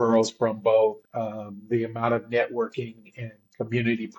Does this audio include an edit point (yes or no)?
yes